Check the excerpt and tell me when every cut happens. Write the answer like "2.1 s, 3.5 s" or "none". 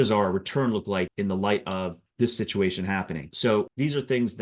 1.1 s, 2.0 s, 3.6 s